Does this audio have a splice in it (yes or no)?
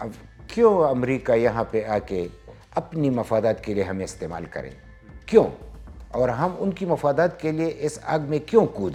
no